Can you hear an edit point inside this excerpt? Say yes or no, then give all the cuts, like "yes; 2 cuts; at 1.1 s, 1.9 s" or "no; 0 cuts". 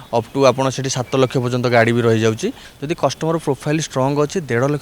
yes; 1 cut; at 2.7 s